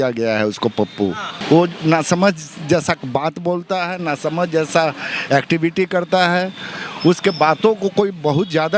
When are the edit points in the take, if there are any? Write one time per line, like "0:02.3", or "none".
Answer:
0:01.3